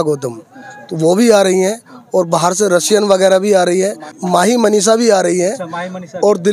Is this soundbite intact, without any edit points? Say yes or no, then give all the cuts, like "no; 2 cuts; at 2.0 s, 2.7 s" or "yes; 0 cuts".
no; 1 cut; at 4.1 s